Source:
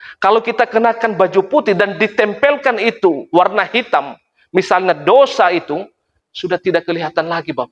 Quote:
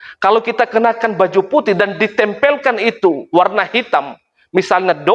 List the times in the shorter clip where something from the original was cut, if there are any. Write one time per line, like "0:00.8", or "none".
none